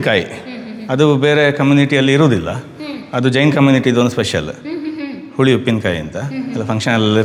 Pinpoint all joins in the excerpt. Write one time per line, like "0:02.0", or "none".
none